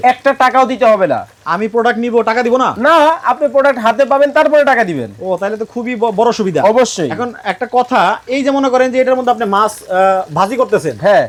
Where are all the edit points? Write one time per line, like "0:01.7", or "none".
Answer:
none